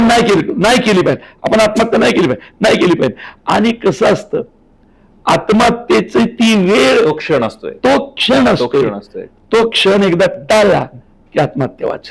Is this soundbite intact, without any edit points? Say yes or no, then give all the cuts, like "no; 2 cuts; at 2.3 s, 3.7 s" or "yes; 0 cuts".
yes; 0 cuts